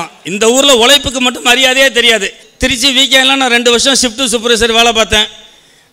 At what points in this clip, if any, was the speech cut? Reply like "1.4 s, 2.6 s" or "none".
2.4 s